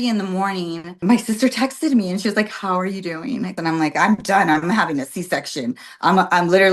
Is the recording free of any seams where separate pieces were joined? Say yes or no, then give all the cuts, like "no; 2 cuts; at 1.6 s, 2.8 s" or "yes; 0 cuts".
no; 2 cuts; at 1.0 s, 3.6 s